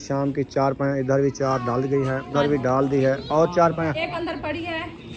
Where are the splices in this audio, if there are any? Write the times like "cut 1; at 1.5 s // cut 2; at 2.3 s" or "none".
cut 1; at 2.3 s // cut 2; at 4.1 s